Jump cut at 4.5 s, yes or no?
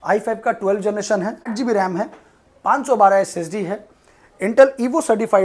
no